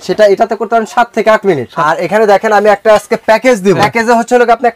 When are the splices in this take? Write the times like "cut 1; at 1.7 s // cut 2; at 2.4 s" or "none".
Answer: cut 1; at 1.7 s // cut 2; at 3.8 s